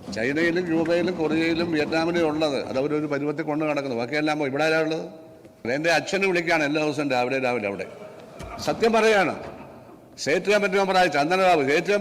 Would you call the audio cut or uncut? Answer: cut